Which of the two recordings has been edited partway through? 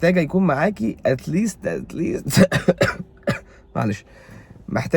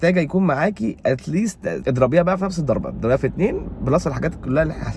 second; 1 cut; at 1.8 s

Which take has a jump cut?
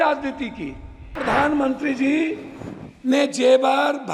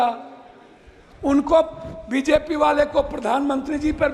first; 1 cut; at 1.2 s

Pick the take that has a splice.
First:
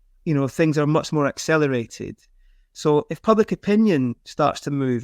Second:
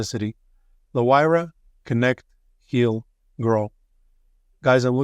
first; 1 cut; at 1.1 s

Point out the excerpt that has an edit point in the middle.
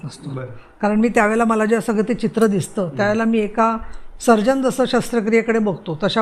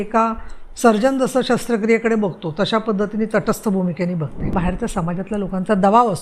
second; 1 cut; at 4.5 s

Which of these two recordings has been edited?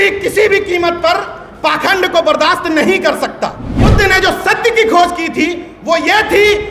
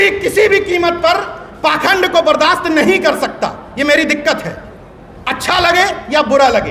first; 1 cut; at 3.7 s

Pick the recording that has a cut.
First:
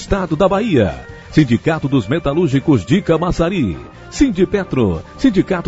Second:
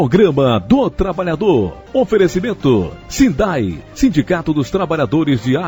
second; 2 cuts; at 1.8 s, 3.0 s

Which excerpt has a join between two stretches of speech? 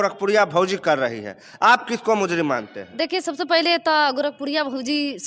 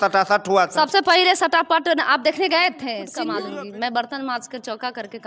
second; 1 cut; at 3.3 s

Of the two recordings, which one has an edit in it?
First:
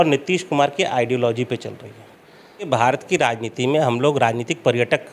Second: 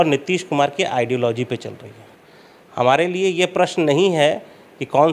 first; 1 cut; at 2.7 s

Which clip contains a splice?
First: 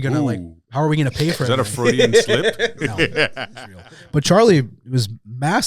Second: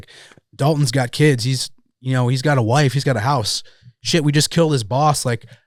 first; 1 cut; at 3.7 s

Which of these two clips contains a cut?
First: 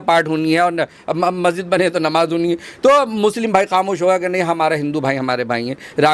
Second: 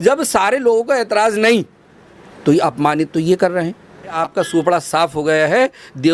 second; 1 cut; at 4.2 s

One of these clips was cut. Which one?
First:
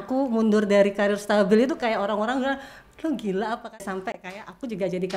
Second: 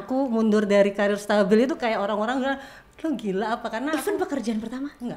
first; 1 cut; at 3.7 s

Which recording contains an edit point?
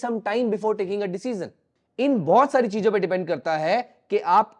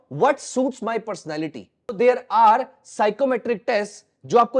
second; 1 cut; at 2.0 s

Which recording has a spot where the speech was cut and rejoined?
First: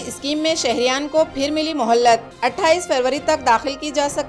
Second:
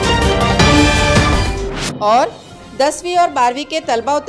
second; 1 cut; at 1.3 s

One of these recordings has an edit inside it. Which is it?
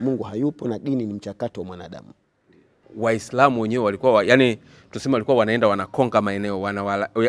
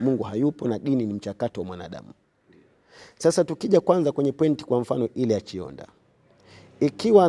first; 1 cut; at 2.8 s

